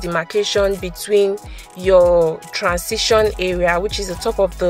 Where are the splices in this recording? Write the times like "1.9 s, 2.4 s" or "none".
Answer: none